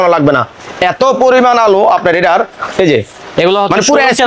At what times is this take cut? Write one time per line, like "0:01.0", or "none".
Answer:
none